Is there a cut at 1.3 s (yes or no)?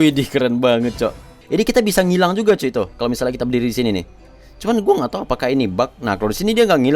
yes